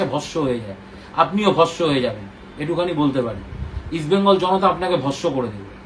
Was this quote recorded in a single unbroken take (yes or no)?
yes